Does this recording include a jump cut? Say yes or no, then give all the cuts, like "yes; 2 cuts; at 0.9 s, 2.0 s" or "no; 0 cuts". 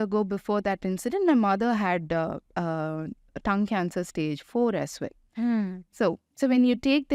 no; 0 cuts